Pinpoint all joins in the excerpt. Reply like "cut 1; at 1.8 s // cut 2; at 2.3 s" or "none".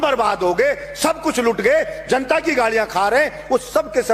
none